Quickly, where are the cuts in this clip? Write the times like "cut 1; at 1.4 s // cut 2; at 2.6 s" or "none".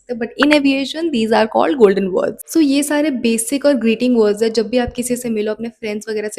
cut 1; at 2.4 s